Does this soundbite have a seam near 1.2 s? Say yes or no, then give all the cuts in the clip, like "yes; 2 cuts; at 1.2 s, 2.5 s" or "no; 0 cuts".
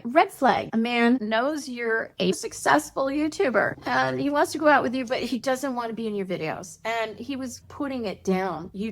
yes; 2 cuts; at 1.2 s, 2.4 s